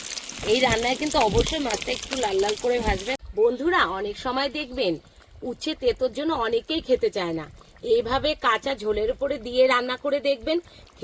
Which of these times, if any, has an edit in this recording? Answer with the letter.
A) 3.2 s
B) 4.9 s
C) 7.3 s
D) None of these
A